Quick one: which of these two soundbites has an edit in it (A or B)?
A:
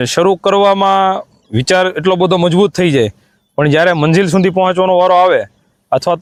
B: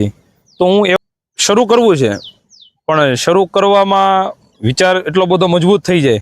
B